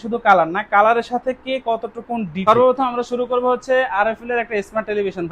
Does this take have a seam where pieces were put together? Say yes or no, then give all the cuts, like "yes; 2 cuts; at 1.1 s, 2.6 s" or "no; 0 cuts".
yes; 1 cut; at 2.4 s